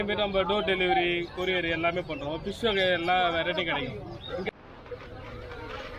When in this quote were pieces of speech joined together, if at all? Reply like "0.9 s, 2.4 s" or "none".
4.5 s